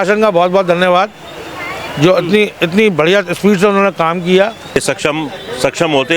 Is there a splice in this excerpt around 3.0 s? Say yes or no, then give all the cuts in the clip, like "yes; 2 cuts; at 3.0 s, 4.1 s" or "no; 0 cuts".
no; 1 cut; at 4.8 s